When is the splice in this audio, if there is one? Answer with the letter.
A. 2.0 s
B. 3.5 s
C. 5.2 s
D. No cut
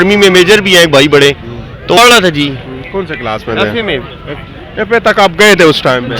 A